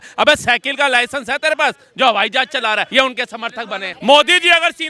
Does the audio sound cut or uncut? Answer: cut